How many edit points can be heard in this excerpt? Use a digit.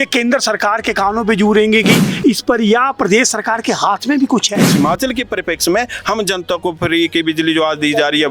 1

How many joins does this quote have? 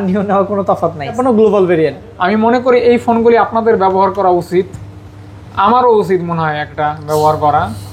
1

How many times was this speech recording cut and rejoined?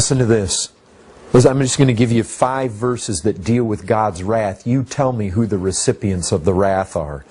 1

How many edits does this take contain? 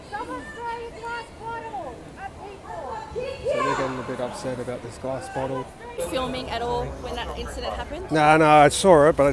1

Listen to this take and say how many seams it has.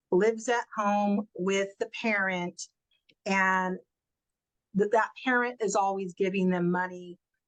0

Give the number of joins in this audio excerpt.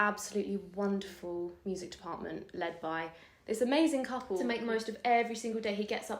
2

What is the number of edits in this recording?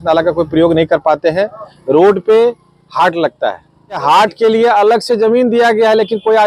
1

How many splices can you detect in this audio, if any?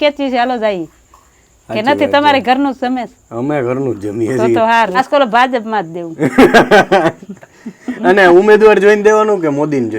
1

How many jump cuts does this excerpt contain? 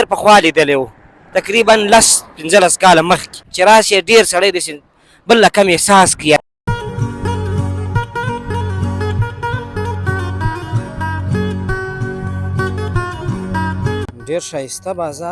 2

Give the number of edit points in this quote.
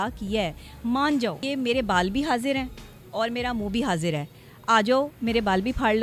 1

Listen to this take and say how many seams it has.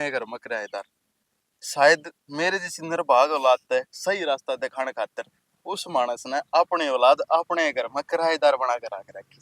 0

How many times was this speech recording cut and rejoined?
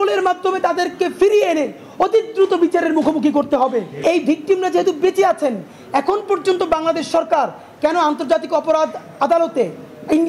1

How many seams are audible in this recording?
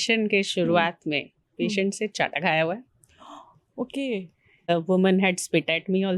1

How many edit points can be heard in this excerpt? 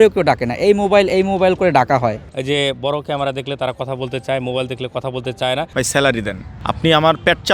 2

